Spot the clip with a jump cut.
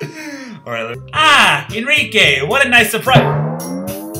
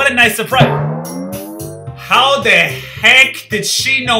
first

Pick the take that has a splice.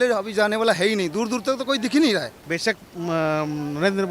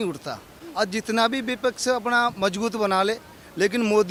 first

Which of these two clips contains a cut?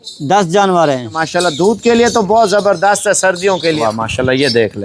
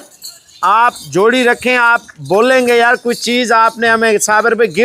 first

